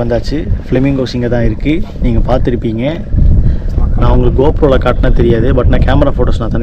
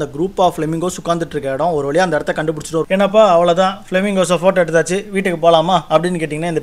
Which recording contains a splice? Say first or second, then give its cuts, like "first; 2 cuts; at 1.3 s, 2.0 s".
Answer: second; 1 cut; at 2.9 s